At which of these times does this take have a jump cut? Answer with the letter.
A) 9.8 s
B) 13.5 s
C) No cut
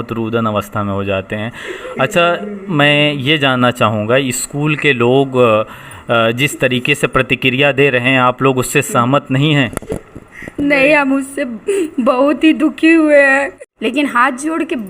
B